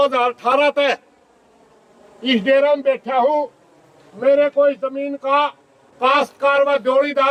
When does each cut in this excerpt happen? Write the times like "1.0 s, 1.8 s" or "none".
none